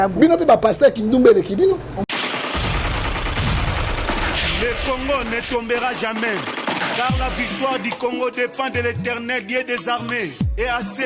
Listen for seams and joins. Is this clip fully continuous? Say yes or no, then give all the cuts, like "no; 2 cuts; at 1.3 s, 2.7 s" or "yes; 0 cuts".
no; 1 cut; at 2.0 s